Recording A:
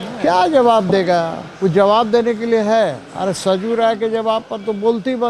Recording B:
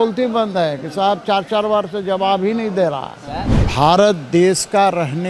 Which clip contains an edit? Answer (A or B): B